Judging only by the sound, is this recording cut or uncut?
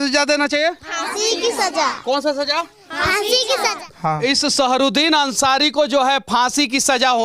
cut